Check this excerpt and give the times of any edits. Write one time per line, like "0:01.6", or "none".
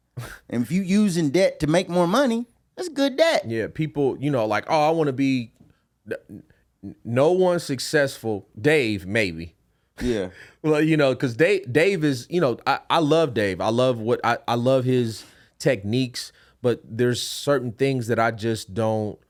none